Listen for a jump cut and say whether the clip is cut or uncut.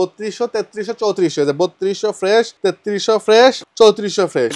cut